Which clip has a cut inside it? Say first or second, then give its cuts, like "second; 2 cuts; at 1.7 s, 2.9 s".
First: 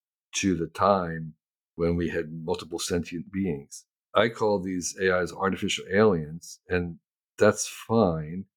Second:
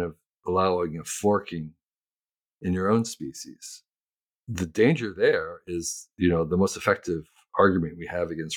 first; 1 cut; at 4.0 s